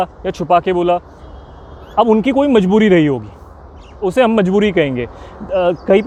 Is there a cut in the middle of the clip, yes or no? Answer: no